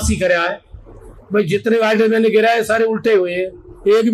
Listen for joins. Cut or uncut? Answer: uncut